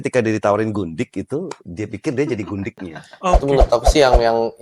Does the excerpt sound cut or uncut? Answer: cut